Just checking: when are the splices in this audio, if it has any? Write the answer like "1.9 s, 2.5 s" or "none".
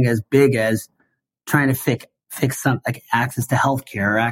none